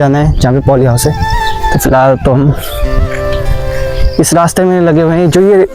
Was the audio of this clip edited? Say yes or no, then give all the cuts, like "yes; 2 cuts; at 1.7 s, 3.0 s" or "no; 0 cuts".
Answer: no; 0 cuts